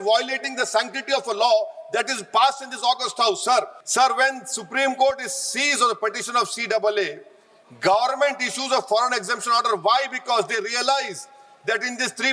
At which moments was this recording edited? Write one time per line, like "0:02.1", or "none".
0:03.8